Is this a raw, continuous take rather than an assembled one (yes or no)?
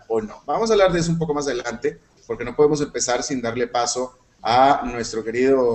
no